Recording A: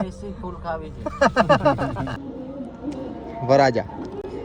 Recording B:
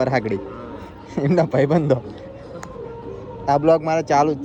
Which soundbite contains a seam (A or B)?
A